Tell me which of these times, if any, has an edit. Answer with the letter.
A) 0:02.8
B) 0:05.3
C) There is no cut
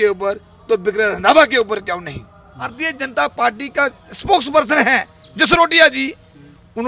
A